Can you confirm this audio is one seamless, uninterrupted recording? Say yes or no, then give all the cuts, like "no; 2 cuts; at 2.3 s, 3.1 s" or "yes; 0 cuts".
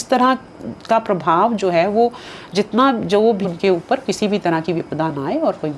no; 1 cut; at 3.5 s